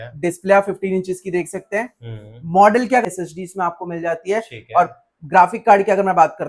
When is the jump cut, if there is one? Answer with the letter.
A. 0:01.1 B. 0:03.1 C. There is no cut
B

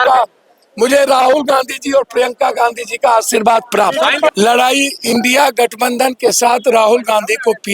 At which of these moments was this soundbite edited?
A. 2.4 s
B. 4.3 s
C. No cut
B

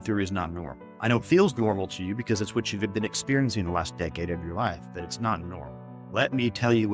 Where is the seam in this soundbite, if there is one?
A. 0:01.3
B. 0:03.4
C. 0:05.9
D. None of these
D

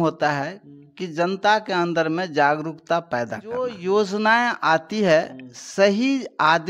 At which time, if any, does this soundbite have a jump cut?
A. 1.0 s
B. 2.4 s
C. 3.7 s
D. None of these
C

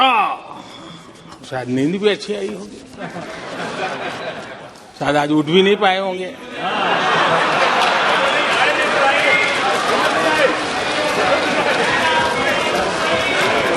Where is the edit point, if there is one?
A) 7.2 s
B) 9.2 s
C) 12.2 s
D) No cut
D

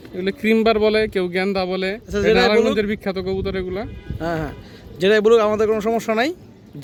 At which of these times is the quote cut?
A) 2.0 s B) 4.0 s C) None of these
C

